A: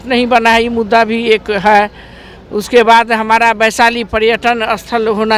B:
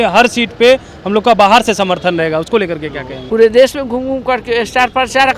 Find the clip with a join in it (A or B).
B